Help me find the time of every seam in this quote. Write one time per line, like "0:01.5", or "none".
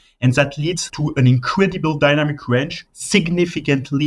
0:00.9
0:02.8